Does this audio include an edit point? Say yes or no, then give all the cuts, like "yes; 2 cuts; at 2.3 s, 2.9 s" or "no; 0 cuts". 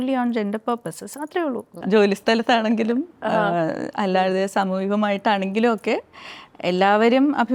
yes; 1 cut; at 1.8 s